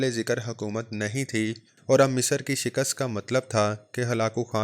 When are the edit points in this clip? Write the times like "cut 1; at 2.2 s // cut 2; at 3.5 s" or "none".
cut 1; at 1.7 s